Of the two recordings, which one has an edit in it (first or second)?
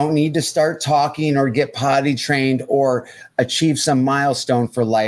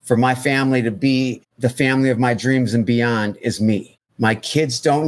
second